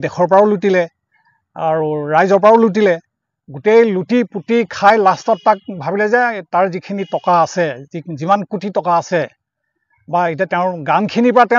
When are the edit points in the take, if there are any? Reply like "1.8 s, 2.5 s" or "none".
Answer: none